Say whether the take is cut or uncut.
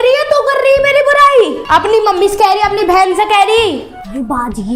uncut